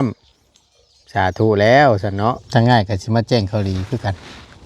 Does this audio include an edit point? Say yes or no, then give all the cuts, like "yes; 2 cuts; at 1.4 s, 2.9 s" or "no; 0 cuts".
yes; 1 cut; at 2.4 s